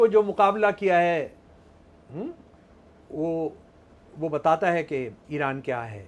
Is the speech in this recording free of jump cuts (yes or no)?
yes